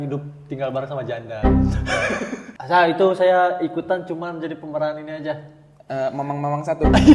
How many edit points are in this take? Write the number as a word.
one